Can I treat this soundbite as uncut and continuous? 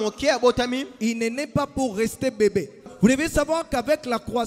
no; 1 cut; at 2.9 s

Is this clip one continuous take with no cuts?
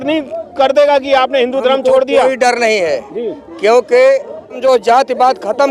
no; 1 cut; at 4.6 s

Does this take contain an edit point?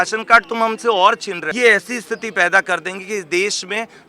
yes; 1 cut; at 1.4 s

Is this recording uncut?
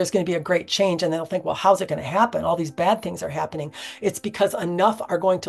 yes; 0 cuts

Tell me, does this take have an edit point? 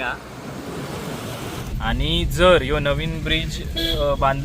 yes; 1 cut; at 1.6 s

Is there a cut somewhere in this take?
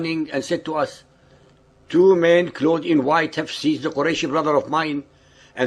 yes; 1 cut; at 4.2 s

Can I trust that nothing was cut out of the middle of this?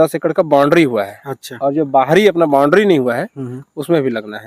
yes; 0 cuts

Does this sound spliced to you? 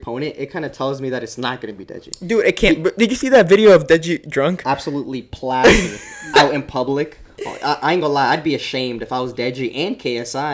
no; 0 cuts

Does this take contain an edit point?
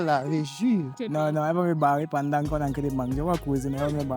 yes; 1 cut; at 1.0 s

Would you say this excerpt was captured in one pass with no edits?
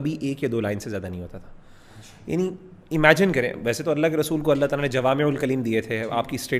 yes; 0 cuts

